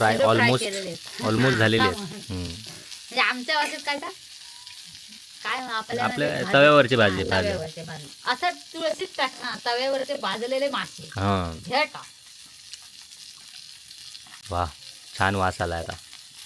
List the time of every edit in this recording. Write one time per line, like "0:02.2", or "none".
0:14.4